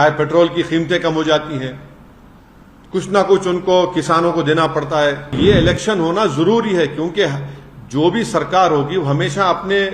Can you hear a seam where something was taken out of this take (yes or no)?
yes